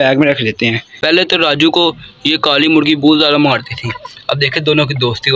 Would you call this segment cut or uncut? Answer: cut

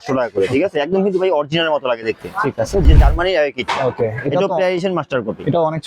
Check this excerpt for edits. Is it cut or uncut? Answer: cut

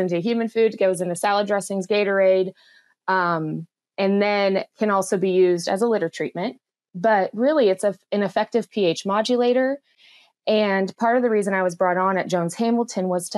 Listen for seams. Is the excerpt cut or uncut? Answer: uncut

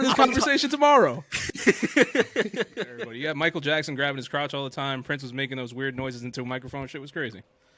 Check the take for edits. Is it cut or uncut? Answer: cut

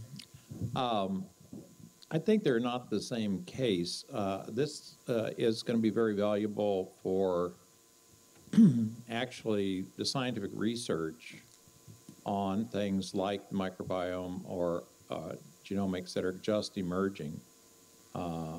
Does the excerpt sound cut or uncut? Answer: uncut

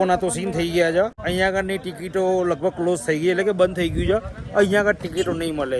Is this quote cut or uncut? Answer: cut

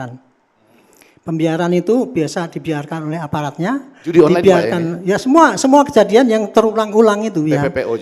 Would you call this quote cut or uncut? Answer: uncut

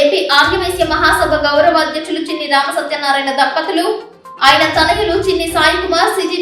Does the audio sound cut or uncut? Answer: uncut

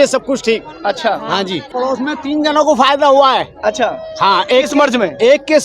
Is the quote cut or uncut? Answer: cut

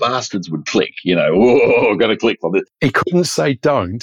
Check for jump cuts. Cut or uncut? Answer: cut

